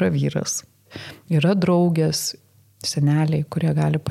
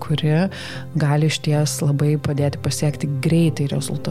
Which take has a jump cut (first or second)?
first